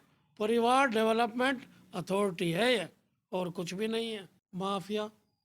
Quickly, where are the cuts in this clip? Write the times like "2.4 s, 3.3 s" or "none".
4.4 s